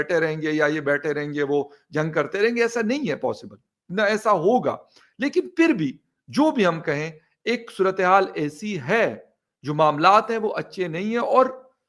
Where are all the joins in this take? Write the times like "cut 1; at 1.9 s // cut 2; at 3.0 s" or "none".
none